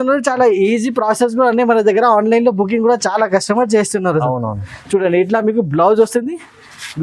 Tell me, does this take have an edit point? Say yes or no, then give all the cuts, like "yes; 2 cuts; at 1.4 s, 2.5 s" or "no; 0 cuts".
no; 0 cuts